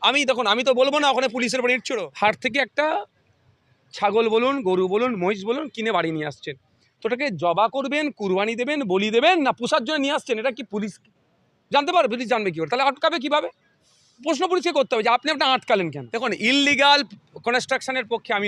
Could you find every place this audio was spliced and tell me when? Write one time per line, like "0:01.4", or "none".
0:01.9
0:16.0